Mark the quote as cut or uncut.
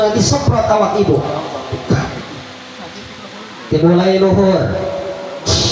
uncut